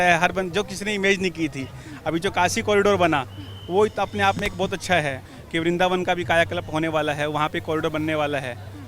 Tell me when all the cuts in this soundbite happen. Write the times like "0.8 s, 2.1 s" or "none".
5.3 s